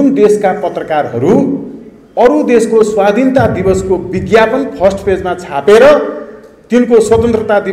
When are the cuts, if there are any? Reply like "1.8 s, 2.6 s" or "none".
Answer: none